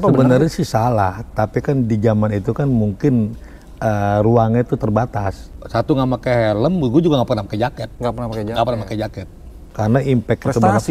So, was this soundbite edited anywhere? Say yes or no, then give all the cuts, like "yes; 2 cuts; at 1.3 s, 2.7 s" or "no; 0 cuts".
yes; 2 cuts; at 5.4 s, 9.6 s